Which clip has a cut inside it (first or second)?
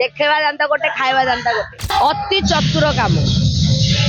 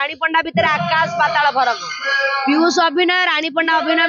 first